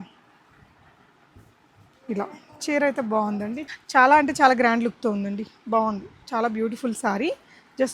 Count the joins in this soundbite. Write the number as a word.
one